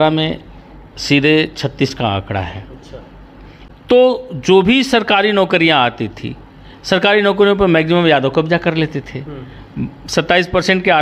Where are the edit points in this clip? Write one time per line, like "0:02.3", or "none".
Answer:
0:03.6